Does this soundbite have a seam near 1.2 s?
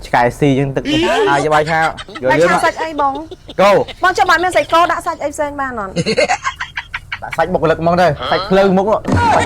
yes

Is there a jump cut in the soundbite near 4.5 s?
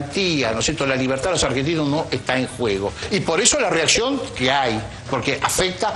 no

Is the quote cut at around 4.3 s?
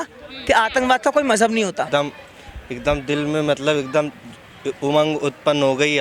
no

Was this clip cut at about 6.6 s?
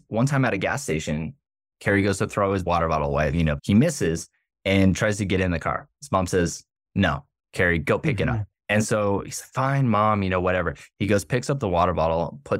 no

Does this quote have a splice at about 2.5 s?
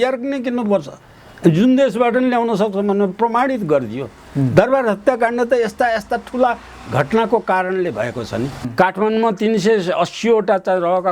no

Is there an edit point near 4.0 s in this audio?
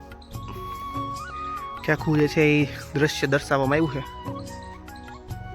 yes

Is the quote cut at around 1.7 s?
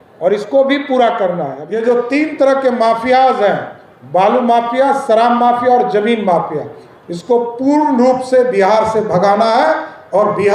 yes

